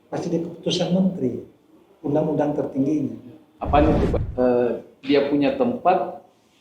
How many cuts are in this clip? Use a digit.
1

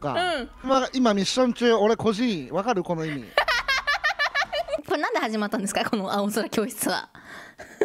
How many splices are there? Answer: 1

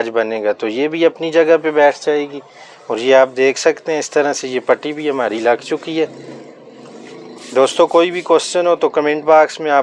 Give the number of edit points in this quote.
0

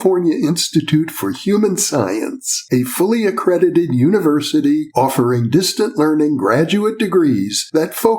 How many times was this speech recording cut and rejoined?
0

